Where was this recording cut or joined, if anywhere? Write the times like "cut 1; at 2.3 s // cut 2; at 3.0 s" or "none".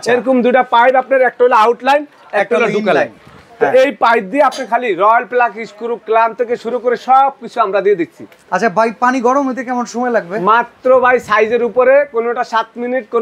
none